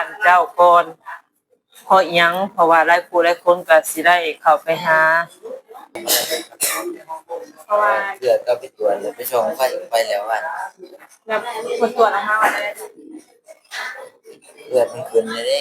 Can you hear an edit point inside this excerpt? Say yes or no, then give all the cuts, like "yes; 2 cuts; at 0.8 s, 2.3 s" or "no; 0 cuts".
yes; 1 cut; at 6.0 s